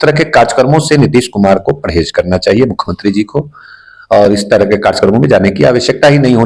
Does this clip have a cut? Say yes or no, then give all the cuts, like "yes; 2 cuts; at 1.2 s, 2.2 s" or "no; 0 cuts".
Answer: no; 0 cuts